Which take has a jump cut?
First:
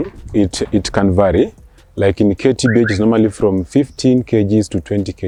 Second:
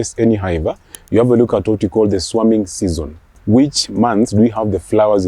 second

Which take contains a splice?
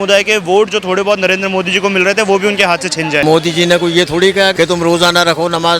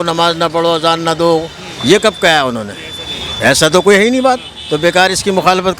first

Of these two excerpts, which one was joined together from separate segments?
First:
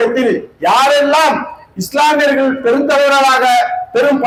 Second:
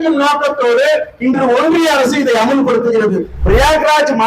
second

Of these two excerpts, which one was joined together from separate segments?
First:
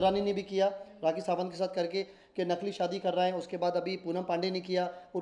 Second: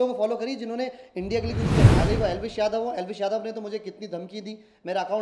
second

